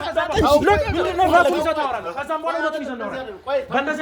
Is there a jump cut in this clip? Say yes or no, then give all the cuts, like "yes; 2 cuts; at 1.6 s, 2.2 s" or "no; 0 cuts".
no; 0 cuts